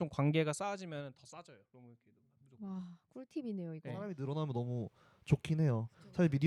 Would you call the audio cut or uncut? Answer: cut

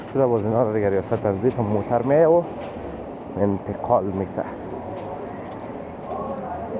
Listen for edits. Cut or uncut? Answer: uncut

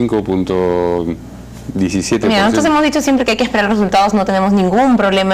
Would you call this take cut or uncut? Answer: uncut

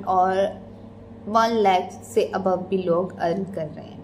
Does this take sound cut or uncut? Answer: uncut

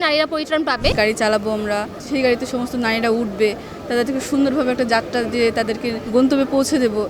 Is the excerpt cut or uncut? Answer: cut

